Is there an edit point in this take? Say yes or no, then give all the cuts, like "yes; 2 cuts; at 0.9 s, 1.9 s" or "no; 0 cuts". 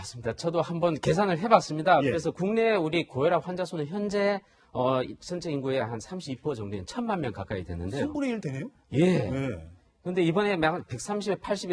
no; 0 cuts